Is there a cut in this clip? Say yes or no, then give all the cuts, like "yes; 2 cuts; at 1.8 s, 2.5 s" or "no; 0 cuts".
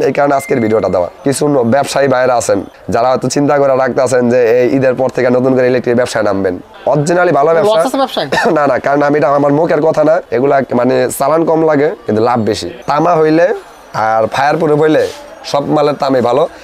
yes; 5 cuts; at 1.1 s, 2.7 s, 6.7 s, 10.3 s, 12.2 s